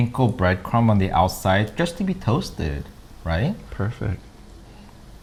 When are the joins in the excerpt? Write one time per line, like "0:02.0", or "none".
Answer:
none